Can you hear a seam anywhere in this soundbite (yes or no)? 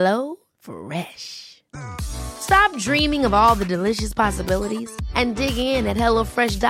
no